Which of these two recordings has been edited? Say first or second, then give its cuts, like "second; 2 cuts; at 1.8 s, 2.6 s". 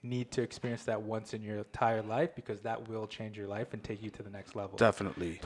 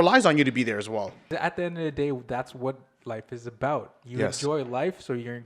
second; 1 cut; at 1.2 s